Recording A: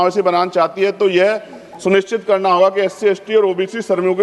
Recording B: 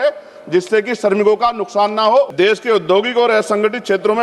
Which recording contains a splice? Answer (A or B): B